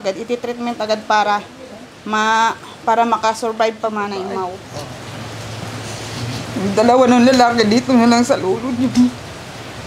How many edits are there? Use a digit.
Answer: 1